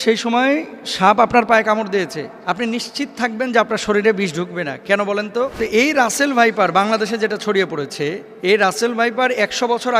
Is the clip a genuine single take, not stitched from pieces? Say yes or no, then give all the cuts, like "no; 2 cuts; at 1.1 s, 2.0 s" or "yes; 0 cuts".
no; 3 cuts; at 2.3 s, 5.5 s, 8.3 s